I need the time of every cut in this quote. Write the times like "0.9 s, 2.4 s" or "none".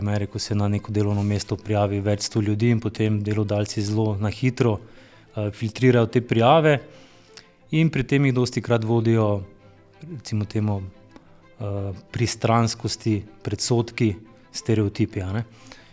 none